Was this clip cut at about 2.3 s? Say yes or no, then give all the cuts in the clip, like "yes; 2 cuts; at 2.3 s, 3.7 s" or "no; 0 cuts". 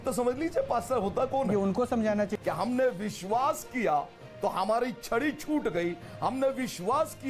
yes; 1 cut; at 2.3 s